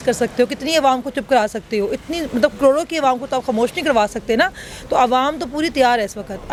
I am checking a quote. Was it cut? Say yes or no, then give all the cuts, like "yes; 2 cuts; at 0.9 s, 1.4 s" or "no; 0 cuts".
no; 0 cuts